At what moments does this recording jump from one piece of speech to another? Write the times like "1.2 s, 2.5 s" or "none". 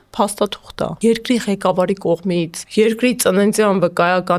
0.9 s, 2.6 s